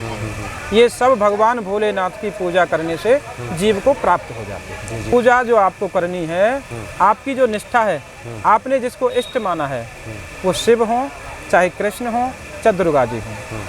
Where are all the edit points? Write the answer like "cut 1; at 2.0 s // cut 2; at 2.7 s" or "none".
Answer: cut 1; at 5.1 s